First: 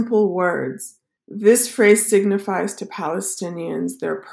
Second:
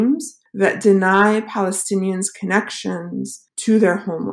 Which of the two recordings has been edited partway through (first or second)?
second